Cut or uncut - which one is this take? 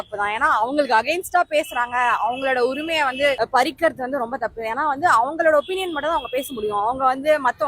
uncut